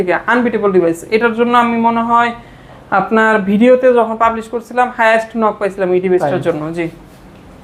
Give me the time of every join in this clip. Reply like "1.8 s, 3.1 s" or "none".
none